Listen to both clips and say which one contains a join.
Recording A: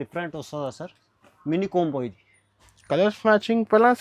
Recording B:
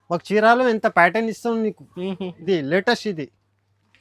B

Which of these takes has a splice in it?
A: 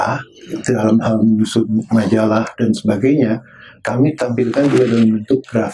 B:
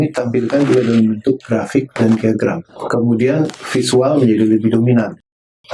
B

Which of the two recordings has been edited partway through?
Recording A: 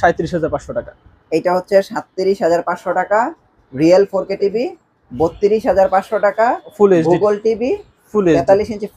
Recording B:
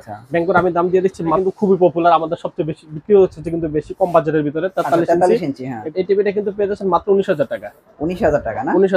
B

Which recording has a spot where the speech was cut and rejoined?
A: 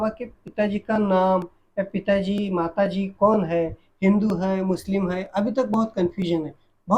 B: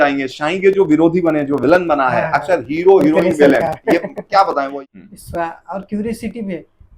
B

